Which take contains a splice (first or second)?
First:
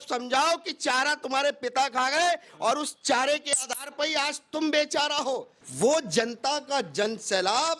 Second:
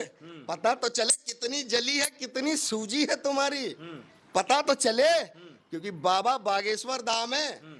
first